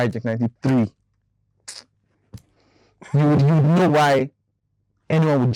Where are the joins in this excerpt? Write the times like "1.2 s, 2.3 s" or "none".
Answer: none